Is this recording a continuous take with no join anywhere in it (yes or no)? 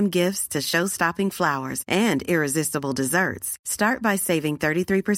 yes